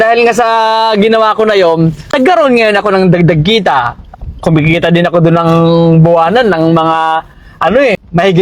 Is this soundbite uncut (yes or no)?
yes